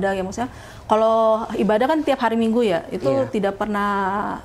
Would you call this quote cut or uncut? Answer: uncut